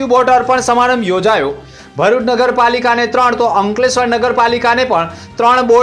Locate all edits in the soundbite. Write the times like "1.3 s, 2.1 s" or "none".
none